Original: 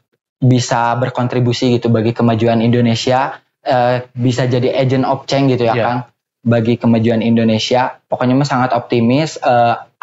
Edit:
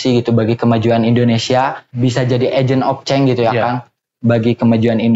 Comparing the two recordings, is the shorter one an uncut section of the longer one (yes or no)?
no